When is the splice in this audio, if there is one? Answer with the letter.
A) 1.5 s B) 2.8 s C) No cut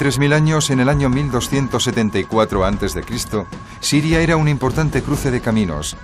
A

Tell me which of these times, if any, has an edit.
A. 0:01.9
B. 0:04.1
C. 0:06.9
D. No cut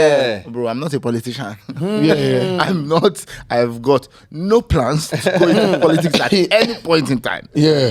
D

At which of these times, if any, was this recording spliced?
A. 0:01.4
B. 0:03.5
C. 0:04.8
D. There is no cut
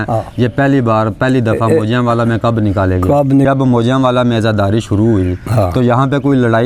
B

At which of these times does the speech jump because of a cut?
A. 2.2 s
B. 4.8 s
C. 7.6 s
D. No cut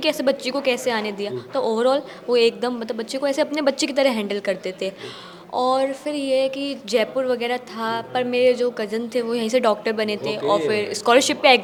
D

